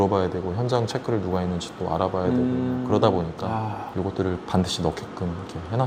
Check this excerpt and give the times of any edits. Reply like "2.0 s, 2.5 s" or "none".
none